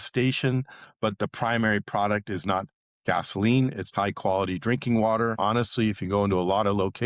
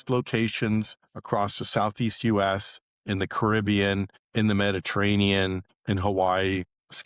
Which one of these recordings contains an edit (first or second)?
first